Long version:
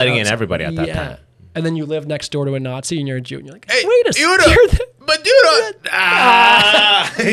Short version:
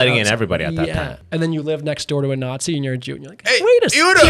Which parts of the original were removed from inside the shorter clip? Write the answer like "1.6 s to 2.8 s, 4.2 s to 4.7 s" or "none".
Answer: 1.2 s to 1.4 s